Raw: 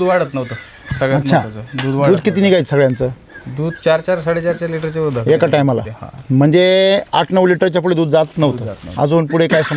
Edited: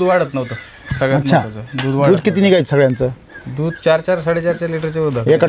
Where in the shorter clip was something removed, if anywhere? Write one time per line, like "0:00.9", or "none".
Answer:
none